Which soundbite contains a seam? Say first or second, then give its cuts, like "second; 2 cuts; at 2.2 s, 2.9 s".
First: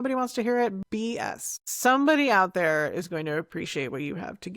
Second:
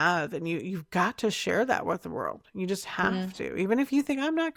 first; 1 cut; at 1.3 s